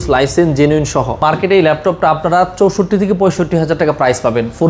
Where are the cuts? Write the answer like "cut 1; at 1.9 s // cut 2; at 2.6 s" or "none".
cut 1; at 1.2 s

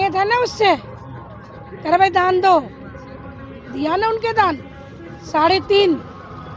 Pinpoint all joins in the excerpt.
none

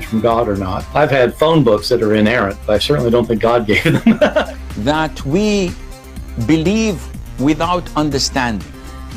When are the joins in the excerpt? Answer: cut 1; at 4.4 s

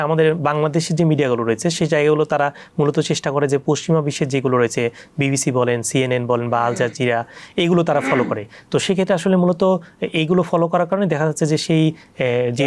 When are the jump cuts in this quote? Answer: none

